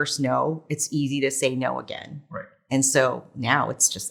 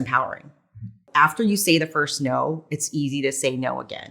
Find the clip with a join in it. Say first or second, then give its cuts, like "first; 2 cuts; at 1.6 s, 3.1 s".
second; 1 cut; at 1.0 s